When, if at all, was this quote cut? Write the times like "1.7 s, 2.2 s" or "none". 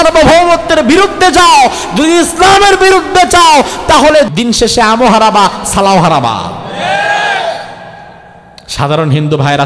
4.3 s

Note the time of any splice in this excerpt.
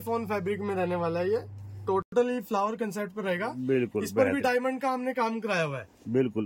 2.1 s

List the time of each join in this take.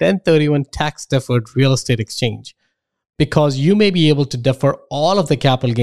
none

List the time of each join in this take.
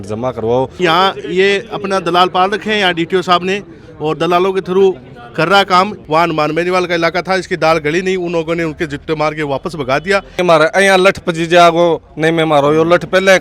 0.8 s, 6.0 s, 10.4 s

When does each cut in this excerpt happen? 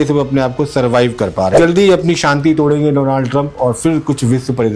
1.5 s

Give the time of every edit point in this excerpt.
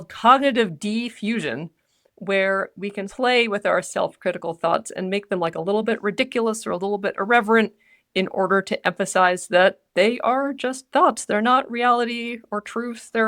3.0 s

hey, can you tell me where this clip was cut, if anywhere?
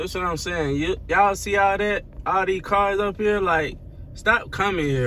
none

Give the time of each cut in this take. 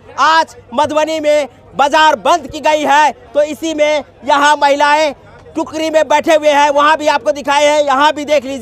none

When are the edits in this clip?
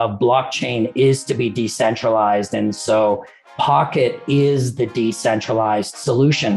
none

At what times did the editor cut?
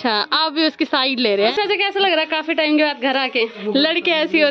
1.5 s, 3.6 s

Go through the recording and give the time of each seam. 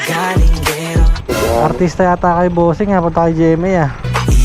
1.2 s

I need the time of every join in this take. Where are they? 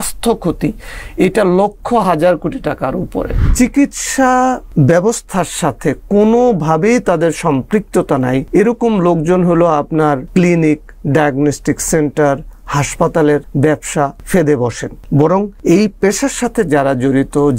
3.4 s, 4.6 s, 8.5 s, 10.3 s, 13.7 s, 15.4 s

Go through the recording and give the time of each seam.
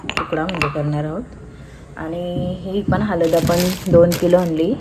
none

